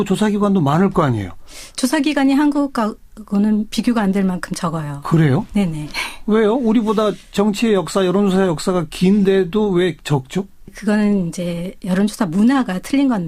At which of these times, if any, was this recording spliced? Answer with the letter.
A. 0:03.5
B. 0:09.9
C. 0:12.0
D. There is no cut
C